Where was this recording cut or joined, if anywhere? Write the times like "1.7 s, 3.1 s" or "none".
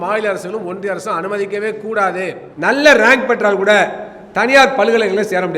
2.4 s